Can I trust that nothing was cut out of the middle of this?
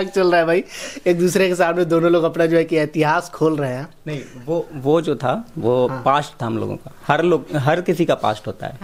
yes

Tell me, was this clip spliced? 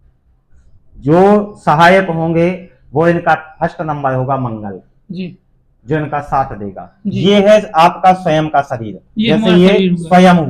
yes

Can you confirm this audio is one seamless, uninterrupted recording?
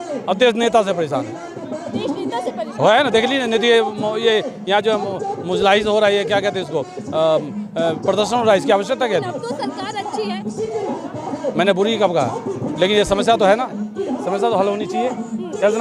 yes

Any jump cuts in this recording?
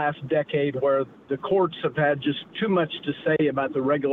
no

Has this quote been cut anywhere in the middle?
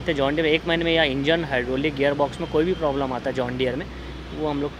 no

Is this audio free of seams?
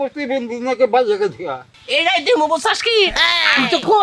no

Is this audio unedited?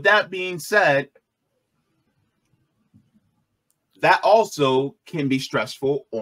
yes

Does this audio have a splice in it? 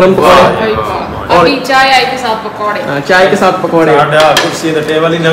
no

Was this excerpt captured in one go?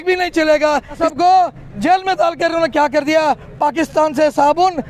no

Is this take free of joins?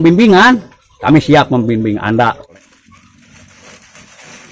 no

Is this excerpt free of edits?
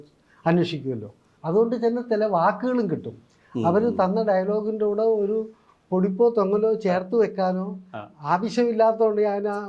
no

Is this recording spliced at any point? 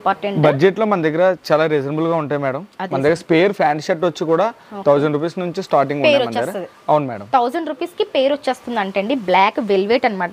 no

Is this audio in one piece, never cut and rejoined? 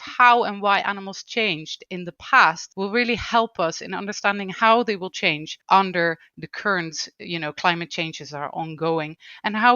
no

